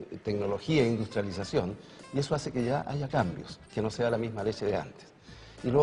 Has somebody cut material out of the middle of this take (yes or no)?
yes